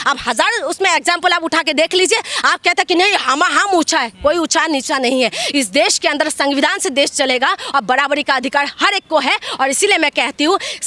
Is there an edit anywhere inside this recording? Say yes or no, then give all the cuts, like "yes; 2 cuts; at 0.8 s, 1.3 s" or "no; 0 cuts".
no; 0 cuts